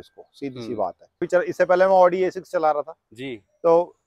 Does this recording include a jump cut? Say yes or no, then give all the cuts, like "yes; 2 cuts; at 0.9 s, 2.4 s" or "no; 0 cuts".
yes; 1 cut; at 1.3 s